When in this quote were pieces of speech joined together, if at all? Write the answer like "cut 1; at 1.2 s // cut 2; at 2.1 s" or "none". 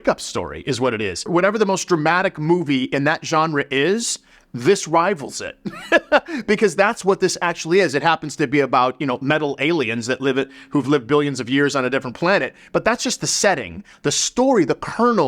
cut 1; at 1.2 s